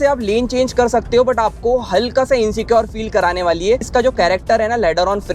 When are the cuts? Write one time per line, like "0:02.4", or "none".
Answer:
0:03.9